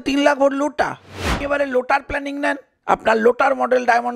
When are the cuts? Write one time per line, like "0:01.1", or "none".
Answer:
0:01.4